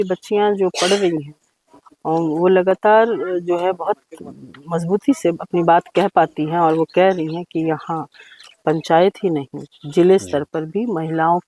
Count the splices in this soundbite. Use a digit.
0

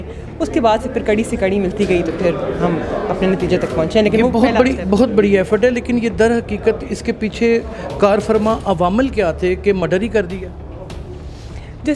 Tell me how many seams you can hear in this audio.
0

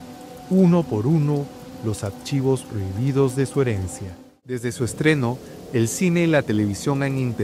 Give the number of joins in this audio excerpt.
1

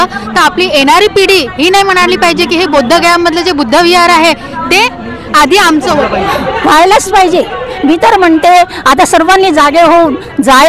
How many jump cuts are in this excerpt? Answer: 1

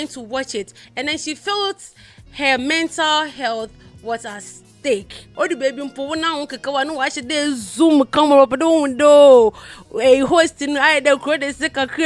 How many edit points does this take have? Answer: 1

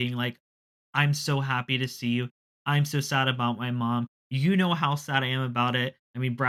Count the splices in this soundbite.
0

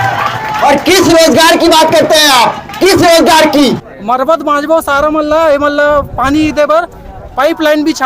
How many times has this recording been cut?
1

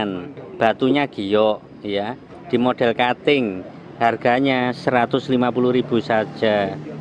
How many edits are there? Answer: 0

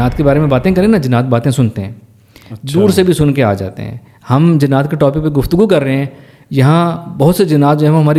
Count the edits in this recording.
0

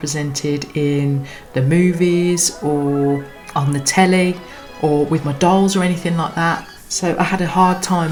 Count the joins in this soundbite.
0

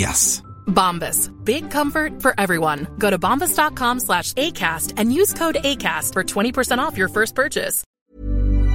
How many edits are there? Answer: 1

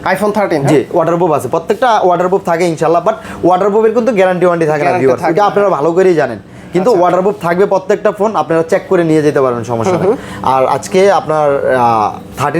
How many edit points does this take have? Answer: 0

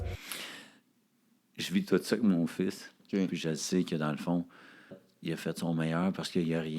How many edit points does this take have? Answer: 2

